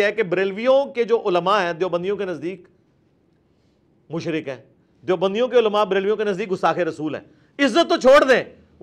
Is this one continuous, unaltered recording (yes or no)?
yes